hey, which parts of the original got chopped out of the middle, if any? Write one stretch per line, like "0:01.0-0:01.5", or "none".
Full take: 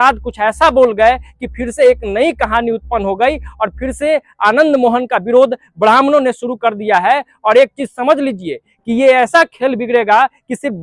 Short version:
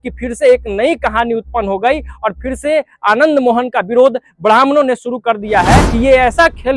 0:07.2-0:08.8

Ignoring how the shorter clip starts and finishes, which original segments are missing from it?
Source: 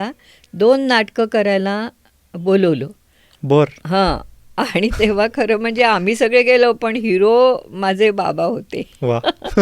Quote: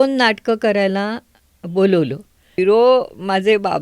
0:03.2-0:07.0

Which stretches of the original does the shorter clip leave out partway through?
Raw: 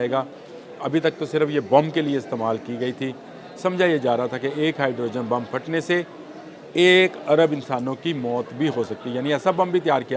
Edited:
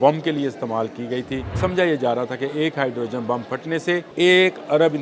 0:03.2-0:03.5
0:06.1-0:06.7

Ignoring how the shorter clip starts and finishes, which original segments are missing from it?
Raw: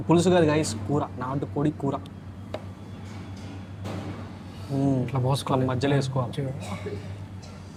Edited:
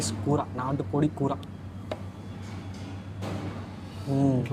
none

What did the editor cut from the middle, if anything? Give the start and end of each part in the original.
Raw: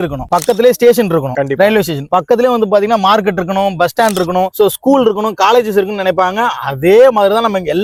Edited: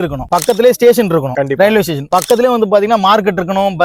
none

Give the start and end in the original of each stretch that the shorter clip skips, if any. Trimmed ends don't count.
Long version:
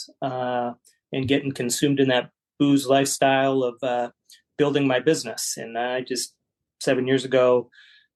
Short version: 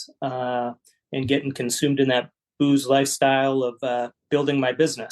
0:04.2-0:04.4

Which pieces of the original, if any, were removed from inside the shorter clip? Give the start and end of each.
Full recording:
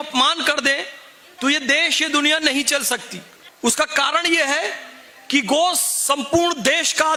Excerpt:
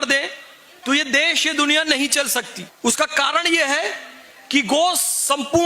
0:03.2-0:03.4

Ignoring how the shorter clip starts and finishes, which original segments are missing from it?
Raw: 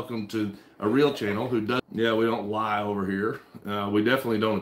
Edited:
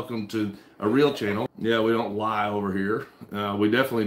0:01.5-0:01.8

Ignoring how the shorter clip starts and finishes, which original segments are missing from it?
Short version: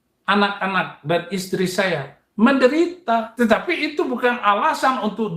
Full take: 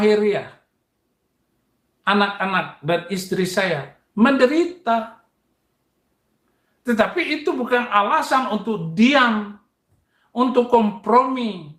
0:05.1-0:06.8

